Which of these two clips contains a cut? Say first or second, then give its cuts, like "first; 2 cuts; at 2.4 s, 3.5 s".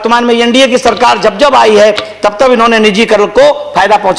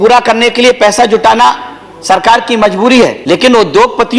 second; 1 cut; at 3.2 s